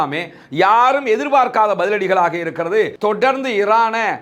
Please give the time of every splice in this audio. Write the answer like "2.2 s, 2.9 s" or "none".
2.9 s

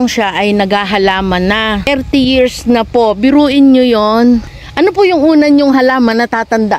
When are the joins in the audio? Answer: 1.9 s, 4.6 s

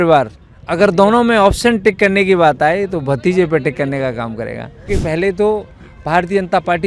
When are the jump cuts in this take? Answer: 4.8 s

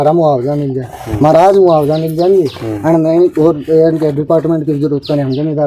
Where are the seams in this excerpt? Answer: none

